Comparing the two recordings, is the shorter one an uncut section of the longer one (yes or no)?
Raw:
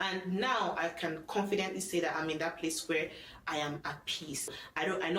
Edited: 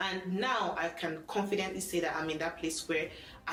yes